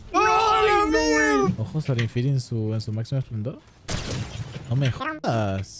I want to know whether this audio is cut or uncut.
cut